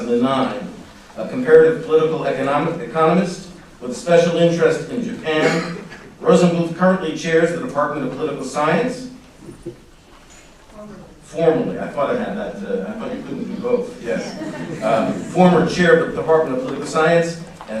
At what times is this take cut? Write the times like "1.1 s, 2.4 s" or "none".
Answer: 8.4 s